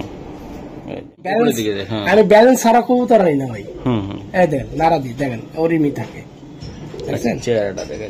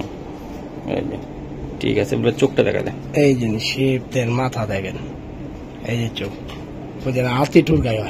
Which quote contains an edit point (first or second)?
first